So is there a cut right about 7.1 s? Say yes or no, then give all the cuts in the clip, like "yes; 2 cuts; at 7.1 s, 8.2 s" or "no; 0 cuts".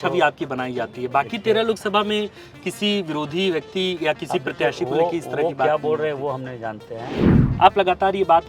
yes; 1 cut; at 7.1 s